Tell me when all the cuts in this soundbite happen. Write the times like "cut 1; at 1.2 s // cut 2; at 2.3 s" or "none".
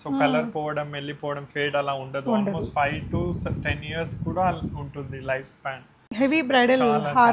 cut 1; at 6.1 s